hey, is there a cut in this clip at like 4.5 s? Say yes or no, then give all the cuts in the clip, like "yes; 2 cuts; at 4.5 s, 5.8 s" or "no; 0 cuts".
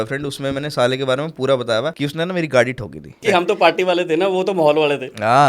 no; 2 cuts; at 1.9 s, 3.1 s